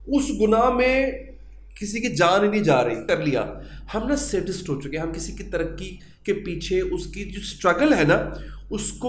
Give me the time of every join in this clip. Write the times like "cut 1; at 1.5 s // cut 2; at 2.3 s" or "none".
cut 1; at 3.0 s